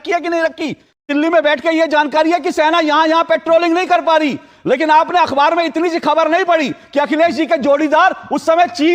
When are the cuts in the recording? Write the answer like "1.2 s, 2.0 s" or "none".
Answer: 1.0 s